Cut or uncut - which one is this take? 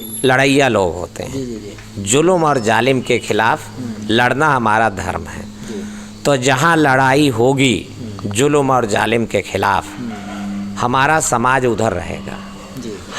uncut